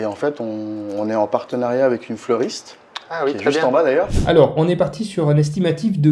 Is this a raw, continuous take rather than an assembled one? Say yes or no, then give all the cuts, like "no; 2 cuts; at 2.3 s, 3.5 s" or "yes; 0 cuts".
no; 1 cut; at 4.2 s